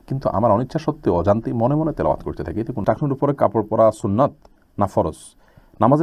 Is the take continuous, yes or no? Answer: no